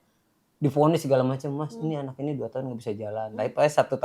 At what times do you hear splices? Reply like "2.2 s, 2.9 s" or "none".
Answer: none